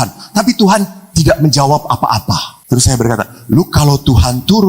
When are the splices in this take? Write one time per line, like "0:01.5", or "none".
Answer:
0:02.5